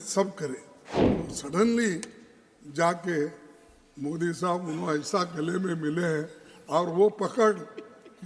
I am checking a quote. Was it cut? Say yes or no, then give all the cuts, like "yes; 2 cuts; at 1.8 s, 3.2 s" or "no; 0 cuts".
yes; 1 cut; at 1.1 s